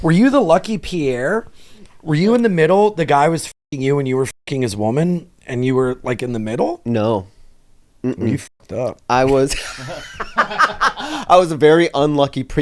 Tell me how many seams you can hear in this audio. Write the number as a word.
zero